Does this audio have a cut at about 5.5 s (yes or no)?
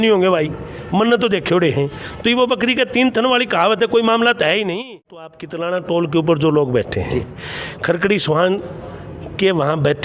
yes